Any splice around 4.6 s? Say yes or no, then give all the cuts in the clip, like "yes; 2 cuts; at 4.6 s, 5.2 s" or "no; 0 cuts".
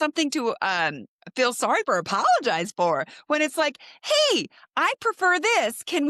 no; 0 cuts